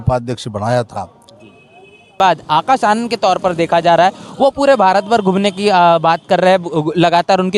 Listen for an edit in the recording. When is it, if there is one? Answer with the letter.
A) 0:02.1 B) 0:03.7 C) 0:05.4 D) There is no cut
A